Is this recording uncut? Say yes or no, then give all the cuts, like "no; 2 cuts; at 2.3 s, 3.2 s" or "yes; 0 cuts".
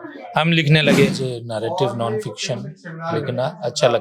no; 1 cut; at 1.2 s